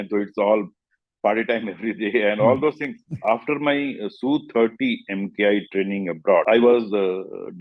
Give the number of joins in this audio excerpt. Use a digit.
2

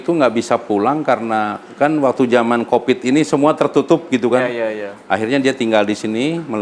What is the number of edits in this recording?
0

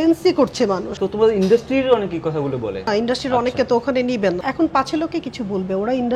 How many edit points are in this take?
3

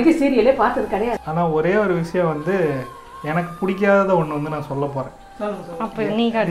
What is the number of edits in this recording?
1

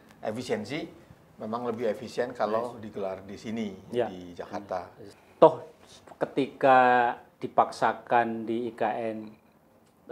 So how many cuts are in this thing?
1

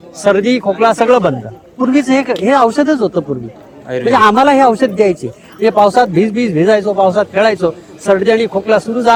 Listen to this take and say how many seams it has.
0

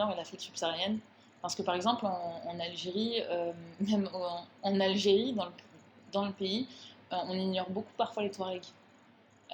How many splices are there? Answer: 0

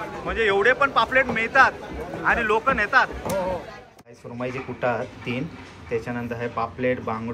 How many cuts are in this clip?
1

